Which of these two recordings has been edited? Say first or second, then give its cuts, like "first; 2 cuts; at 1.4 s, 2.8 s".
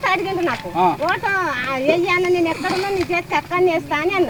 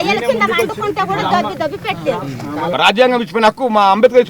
second; 1 cut; at 2.7 s